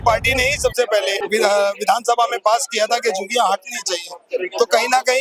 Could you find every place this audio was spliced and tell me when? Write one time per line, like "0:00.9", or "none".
0:01.2